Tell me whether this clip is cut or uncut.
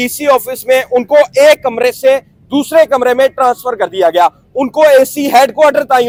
uncut